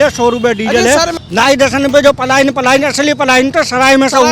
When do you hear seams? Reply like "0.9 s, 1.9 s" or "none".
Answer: 1.1 s